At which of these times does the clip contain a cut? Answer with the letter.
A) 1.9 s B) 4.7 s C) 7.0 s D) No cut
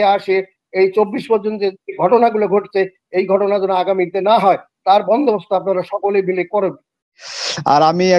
C